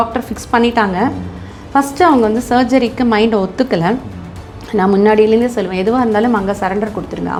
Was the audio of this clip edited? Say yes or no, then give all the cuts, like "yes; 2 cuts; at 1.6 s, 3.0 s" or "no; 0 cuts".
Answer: no; 0 cuts